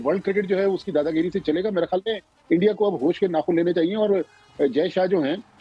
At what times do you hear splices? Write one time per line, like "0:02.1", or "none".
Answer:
none